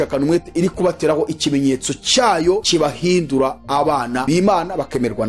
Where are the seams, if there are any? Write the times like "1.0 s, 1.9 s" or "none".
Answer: 2.6 s, 4.2 s